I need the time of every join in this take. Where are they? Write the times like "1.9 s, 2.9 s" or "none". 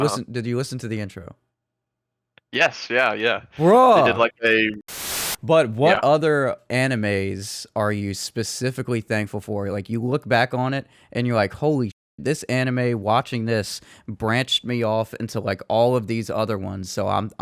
4.8 s